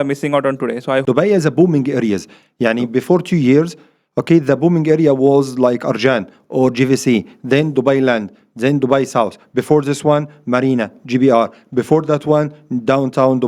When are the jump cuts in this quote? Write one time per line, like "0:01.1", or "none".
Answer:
0:01.0